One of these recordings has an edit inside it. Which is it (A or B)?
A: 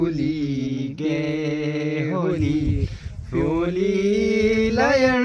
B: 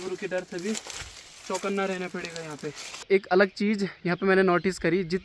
B